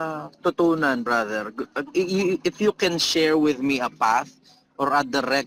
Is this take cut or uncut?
uncut